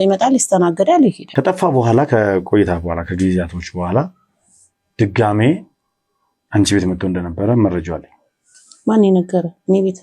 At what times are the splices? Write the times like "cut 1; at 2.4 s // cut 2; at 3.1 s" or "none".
cut 1; at 1.2 s